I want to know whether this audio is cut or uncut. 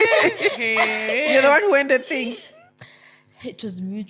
uncut